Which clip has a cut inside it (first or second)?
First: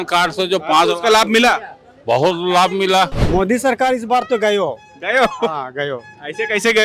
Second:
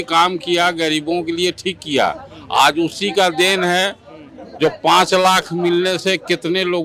first